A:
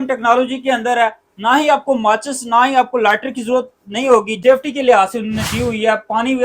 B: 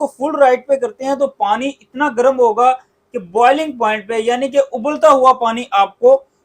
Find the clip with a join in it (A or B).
A